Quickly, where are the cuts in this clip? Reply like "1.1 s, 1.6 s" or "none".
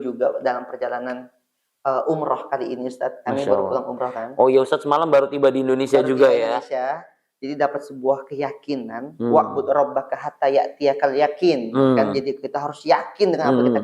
none